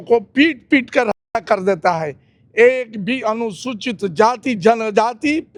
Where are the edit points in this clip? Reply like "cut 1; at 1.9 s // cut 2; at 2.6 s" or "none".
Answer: none

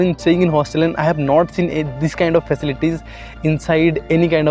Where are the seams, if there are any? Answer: none

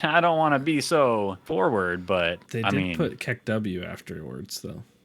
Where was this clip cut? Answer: cut 1; at 1.4 s // cut 2; at 2.4 s

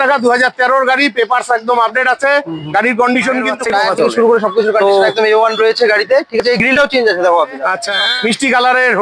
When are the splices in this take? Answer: cut 1; at 3.6 s // cut 2; at 7.9 s

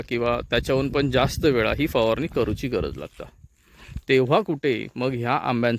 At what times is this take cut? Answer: none

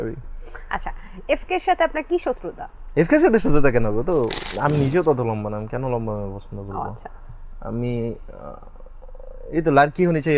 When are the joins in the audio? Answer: cut 1; at 4.4 s

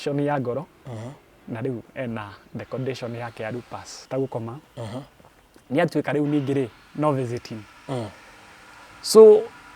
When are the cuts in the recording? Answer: cut 1; at 4.1 s

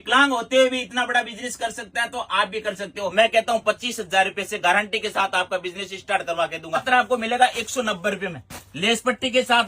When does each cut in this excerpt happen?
cut 1; at 3.1 s // cut 2; at 6.8 s

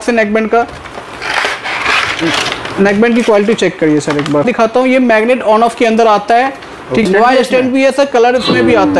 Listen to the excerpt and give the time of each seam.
cut 1; at 4.5 s // cut 2; at 7.1 s

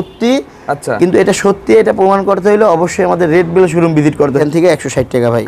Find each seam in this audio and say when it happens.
cut 1; at 4.4 s

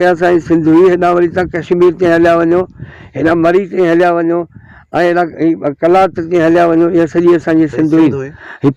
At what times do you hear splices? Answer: none

